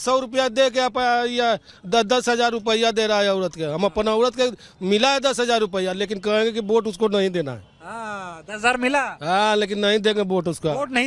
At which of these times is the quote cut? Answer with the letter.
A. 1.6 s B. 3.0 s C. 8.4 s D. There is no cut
D